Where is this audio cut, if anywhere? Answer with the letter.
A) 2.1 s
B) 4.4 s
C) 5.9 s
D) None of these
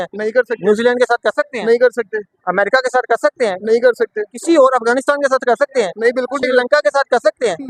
D